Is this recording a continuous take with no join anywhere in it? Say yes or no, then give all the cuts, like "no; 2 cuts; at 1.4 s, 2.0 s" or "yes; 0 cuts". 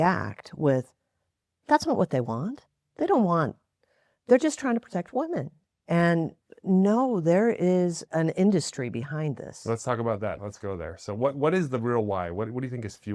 no; 2 cuts; at 8.1 s, 10.5 s